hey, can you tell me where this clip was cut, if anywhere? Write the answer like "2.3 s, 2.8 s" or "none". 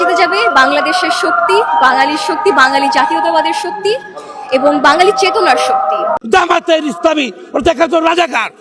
6.1 s

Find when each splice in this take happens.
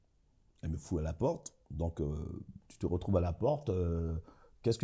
none

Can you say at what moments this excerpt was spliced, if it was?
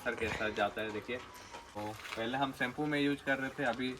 1.7 s

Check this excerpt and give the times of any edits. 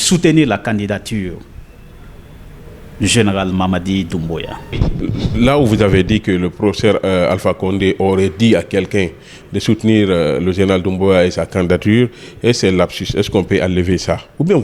4.8 s

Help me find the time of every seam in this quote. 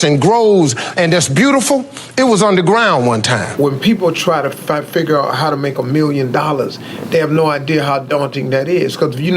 3.5 s

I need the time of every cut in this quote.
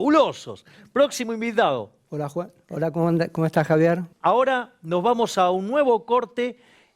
4.1 s

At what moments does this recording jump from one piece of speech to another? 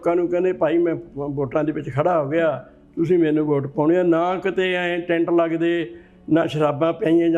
none

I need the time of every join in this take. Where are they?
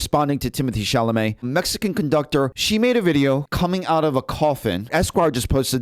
1.5 s, 2.6 s, 3.5 s, 4.9 s

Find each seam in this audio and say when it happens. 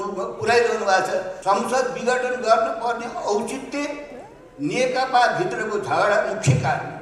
1.3 s

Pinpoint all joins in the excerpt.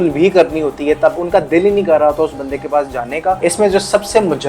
1.2 s, 3.4 s

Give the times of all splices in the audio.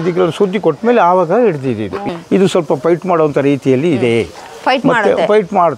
2.0 s

